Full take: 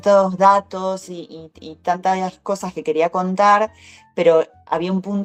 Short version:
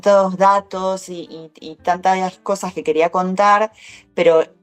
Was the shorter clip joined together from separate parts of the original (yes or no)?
no